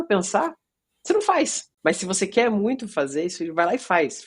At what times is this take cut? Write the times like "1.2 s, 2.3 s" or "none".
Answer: 1.6 s